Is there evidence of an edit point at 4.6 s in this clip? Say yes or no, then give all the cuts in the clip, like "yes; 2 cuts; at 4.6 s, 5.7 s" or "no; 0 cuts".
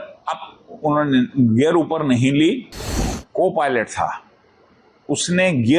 no; 1 cut; at 3.2 s